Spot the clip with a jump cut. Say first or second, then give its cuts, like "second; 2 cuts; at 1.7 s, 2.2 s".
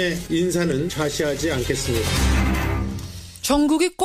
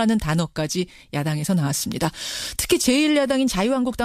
second; 1 cut; at 2.2 s